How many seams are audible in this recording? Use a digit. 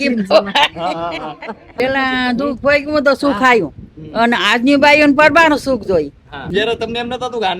2